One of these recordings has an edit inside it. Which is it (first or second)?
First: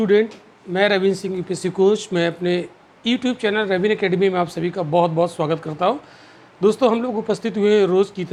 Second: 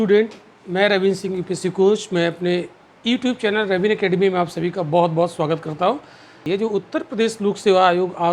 second